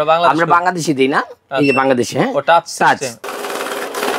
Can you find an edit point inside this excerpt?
yes; 1 cut; at 3.2 s

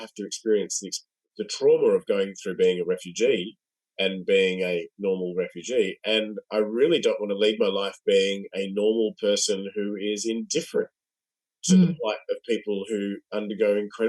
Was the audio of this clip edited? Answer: no; 0 cuts

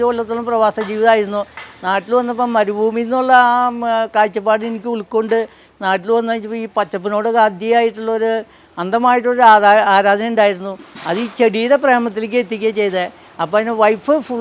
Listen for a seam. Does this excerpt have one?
no; 0 cuts

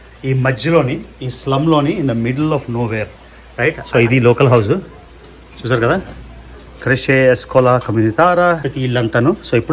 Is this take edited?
yes; 2 cuts; at 3.5 s, 8.7 s

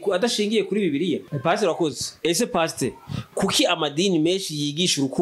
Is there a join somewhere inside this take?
yes; 1 cut; at 1.3 s

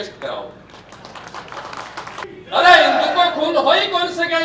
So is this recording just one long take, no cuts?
no; 1 cut; at 2.3 s

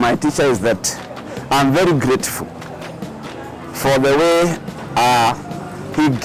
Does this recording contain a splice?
no; 0 cuts

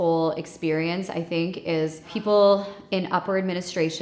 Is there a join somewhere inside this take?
yes; 1 cut; at 2.1 s

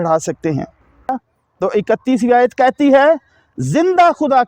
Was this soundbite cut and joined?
yes; 1 cut; at 1.1 s

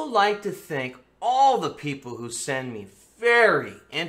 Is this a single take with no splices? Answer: no; 1 cut; at 2.6 s

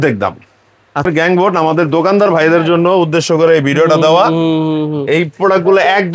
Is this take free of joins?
no; 1 cut; at 1.1 s

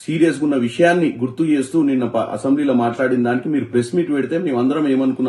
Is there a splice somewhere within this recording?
no; 0 cuts

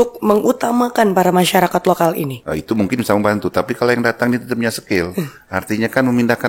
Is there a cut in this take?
yes; 1 cut; at 2.4 s

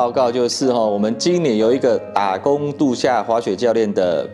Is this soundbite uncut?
yes; 0 cuts

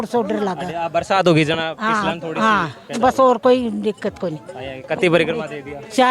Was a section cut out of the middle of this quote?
no; 0 cuts

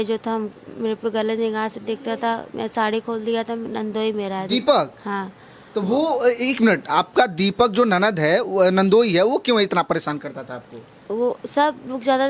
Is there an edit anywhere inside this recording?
no; 0 cuts

